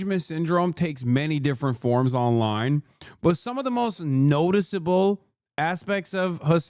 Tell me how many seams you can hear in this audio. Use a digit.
0